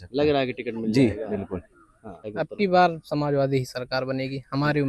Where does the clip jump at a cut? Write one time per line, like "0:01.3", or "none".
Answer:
0:02.3